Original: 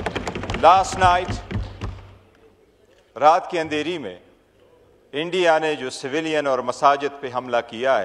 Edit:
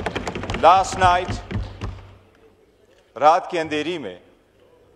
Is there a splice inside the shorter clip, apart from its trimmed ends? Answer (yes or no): no